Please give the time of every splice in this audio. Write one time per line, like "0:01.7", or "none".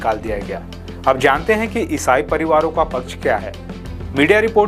none